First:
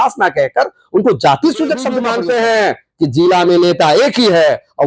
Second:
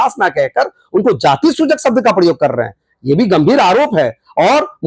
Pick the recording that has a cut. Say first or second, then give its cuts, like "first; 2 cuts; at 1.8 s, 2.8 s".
first; 1 cut; at 2.0 s